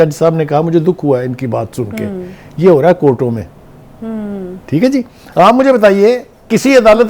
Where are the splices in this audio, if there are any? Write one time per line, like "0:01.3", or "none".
0:05.2